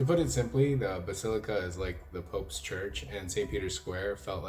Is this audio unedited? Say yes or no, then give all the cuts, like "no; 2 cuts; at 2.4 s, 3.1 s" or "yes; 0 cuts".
yes; 0 cuts